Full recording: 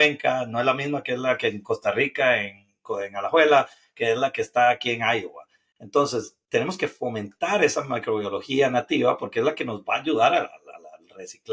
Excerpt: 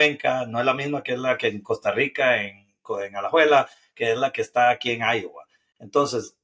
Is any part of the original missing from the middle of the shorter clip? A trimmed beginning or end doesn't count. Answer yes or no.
no